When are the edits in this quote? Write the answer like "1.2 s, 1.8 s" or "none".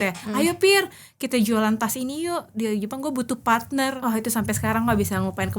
4.0 s